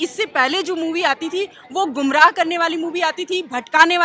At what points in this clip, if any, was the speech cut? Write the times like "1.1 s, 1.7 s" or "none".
none